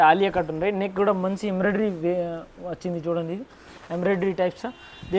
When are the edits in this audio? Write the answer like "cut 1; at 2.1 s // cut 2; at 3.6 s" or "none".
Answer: none

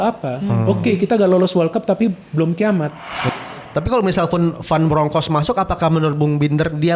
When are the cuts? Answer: cut 1; at 3.3 s

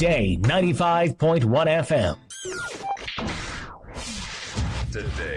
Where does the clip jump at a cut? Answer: cut 1; at 2.4 s

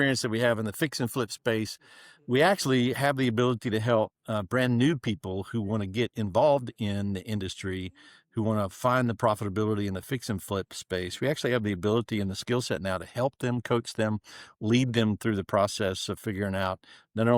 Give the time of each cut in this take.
none

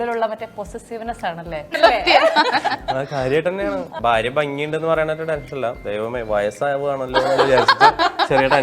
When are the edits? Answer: cut 1; at 1.7 s // cut 2; at 3.9 s

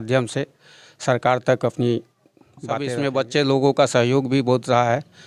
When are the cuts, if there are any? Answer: cut 1; at 2.8 s

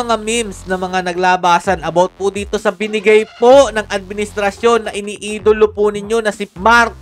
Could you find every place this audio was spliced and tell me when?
none

